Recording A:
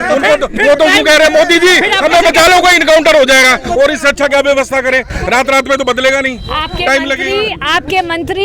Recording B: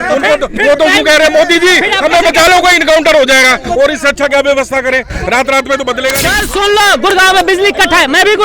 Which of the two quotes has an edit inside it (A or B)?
B